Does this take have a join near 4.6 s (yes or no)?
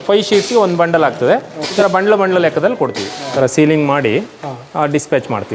no